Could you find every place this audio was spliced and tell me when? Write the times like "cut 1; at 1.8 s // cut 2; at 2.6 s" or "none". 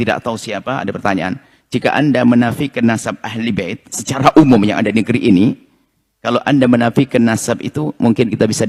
none